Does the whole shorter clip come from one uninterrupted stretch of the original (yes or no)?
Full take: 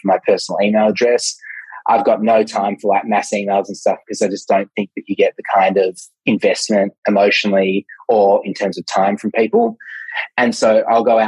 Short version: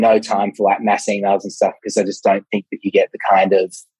yes